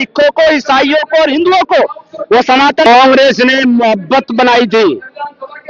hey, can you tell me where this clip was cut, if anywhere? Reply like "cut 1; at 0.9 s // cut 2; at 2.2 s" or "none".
cut 1; at 2.9 s